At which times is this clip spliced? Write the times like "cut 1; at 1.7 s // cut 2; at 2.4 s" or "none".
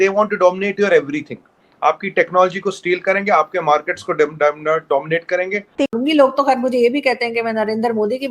cut 1; at 5.9 s